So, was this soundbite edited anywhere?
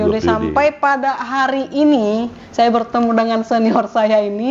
no; 0 cuts

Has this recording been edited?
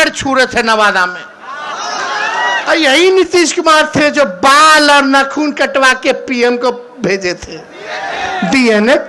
no; 0 cuts

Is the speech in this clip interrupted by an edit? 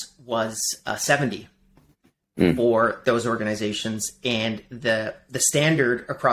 no; 0 cuts

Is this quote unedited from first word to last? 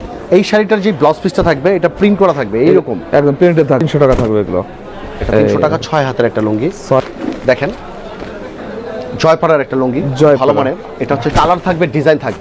no; 3 cuts; at 3.8 s, 7.0 s, 11.3 s

